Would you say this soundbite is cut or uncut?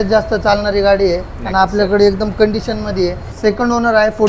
cut